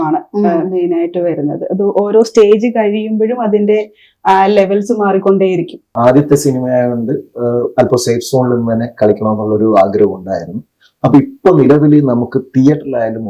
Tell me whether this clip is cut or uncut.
cut